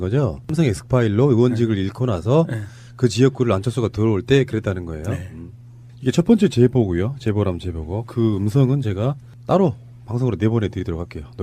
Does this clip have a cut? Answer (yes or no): yes